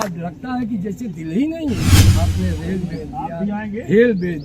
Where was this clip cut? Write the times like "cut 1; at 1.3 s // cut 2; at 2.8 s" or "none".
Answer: cut 1; at 2.0 s